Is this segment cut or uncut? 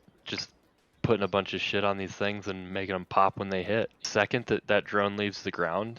cut